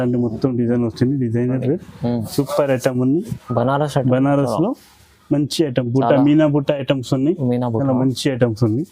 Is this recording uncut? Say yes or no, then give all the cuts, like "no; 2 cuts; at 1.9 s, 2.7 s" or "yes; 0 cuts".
no; 1 cut; at 3.4 s